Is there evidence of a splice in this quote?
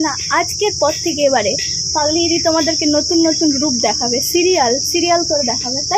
no; 0 cuts

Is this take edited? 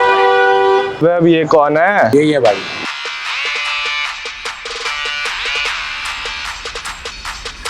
yes; 1 cut; at 2.1 s

